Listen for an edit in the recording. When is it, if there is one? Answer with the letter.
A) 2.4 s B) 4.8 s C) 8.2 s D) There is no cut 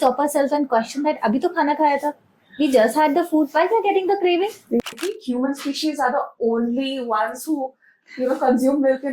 B